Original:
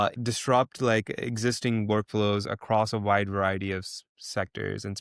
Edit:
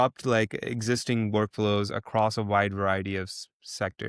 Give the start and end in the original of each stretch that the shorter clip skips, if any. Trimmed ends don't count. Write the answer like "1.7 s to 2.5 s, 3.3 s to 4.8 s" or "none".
none